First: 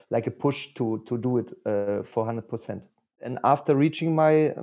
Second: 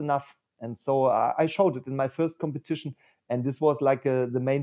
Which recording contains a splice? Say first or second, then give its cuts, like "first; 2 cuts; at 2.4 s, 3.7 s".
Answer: first; 1 cut; at 3.3 s